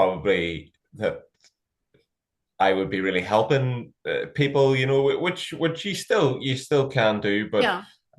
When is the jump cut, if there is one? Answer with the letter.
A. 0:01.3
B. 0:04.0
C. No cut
C